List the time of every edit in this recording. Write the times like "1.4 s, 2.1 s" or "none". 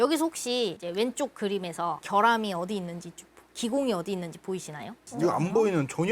none

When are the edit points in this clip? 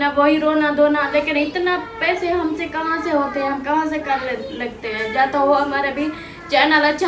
none

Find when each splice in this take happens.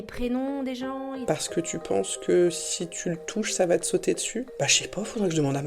1.2 s, 4.5 s

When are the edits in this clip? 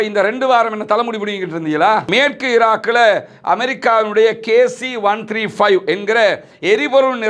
2.1 s

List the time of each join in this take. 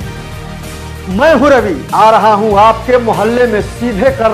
none

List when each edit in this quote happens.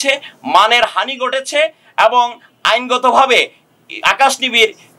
none

